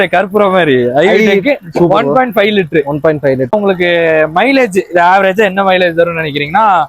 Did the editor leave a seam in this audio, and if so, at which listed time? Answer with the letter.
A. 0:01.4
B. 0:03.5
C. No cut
B